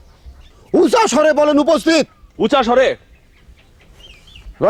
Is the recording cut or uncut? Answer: uncut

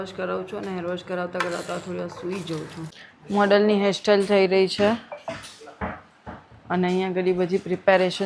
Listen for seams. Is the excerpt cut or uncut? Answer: cut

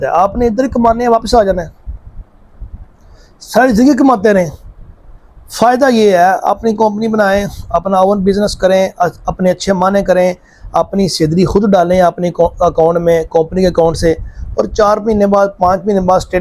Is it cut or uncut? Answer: uncut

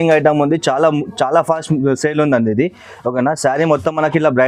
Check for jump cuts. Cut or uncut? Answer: uncut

